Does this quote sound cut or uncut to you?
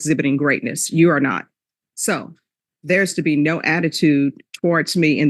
cut